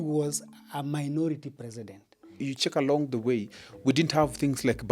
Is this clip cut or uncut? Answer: cut